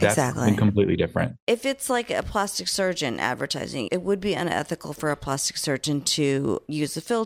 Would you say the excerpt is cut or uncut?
cut